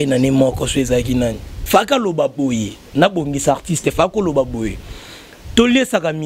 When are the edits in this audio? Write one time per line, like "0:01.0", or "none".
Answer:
0:01.5